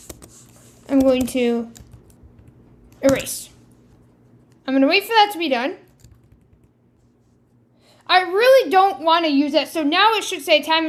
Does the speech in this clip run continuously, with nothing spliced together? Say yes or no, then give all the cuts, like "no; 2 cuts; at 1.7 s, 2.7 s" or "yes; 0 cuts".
yes; 0 cuts